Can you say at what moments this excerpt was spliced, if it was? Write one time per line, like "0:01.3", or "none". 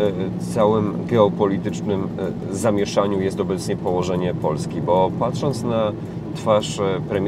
none